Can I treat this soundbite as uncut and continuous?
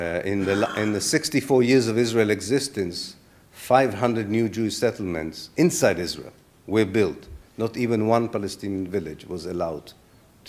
yes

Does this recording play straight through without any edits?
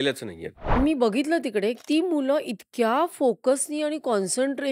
no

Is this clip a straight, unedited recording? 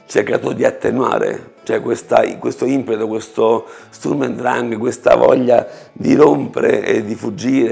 yes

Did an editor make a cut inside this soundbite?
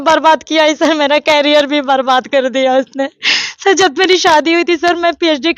no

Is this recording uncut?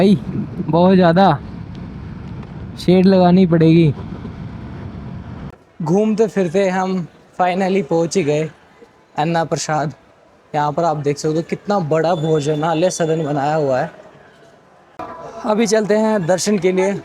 no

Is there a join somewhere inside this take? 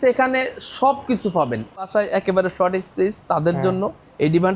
yes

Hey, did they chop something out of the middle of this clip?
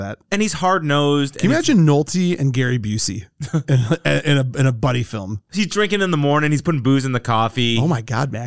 yes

